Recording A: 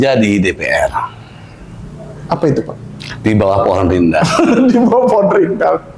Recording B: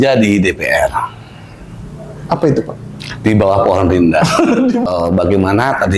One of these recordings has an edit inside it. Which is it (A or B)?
B